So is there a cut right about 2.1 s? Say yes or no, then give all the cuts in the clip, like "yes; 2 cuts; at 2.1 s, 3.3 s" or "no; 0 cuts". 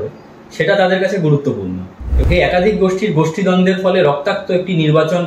yes; 1 cut; at 2.1 s